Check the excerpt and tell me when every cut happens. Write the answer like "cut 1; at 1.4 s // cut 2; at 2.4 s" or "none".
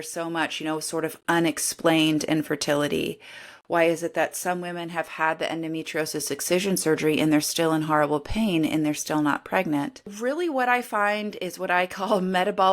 cut 1; at 10.1 s